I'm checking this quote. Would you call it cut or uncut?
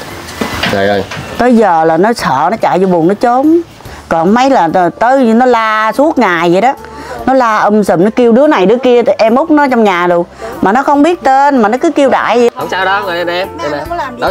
cut